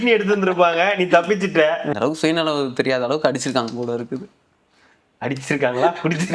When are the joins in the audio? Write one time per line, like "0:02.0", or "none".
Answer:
0:01.9